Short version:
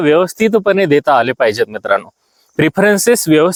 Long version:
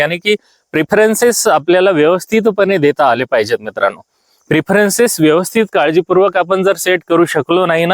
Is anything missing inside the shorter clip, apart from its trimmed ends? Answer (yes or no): no